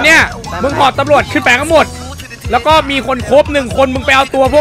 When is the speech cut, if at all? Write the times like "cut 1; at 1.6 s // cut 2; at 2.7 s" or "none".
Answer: none